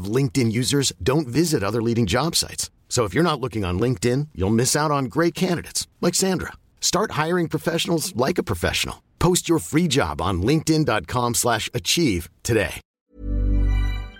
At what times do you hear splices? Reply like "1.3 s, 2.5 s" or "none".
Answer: 12.8 s